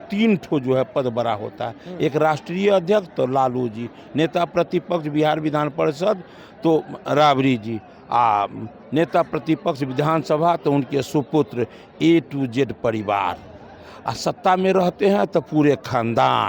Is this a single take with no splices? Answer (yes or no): yes